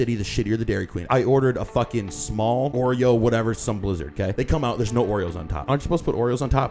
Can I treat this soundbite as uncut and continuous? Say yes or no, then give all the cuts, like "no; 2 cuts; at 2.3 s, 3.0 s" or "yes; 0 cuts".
no; 4 cuts; at 1.0 s, 2.7 s, 4.3 s, 5.6 s